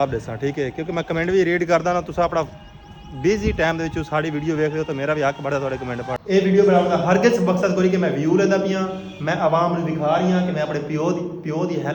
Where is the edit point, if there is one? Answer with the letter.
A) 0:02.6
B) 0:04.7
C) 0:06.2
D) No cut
C